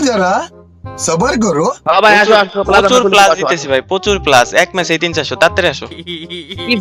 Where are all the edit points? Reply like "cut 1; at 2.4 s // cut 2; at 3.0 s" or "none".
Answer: none